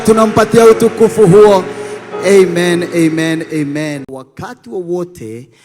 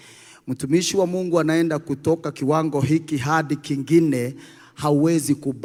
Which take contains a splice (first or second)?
first